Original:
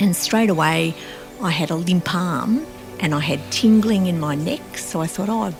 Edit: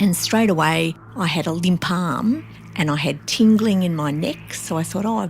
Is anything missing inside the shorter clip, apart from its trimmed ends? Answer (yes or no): yes